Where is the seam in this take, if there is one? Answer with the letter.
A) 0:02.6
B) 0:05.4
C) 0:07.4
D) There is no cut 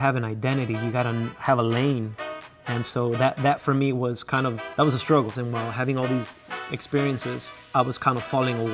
B